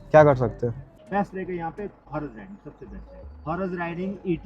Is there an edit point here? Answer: yes; 3 cuts; at 0.9 s, 2.0 s, 3.4 s

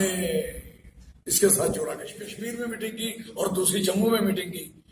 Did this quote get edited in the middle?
yes; 1 cut; at 2.5 s

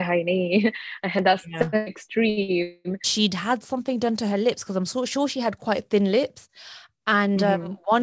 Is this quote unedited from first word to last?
no; 1 cut; at 3.1 s

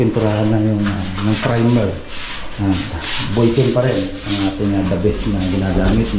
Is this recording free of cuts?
yes; 0 cuts

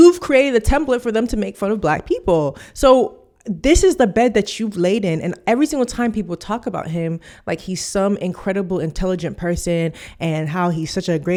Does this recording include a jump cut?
no; 0 cuts

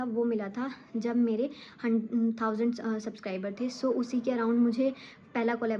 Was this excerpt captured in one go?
yes; 0 cuts

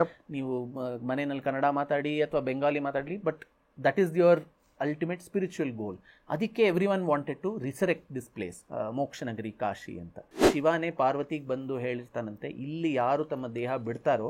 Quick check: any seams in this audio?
yes; 1 cut; at 10.5 s

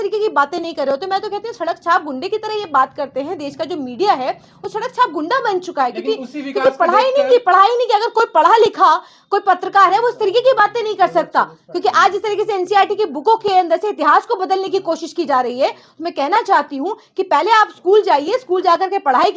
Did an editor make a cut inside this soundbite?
no; 0 cuts

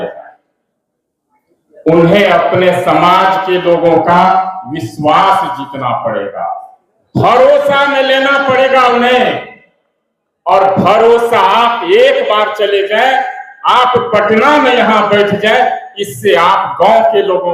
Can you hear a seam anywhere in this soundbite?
no; 0 cuts

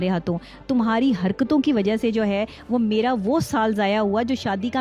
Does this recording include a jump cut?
no; 0 cuts

